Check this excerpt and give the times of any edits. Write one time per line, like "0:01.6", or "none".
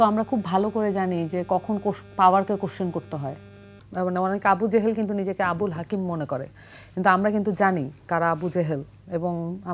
0:03.8